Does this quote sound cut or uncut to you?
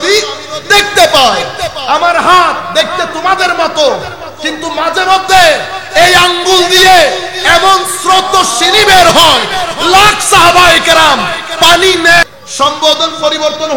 cut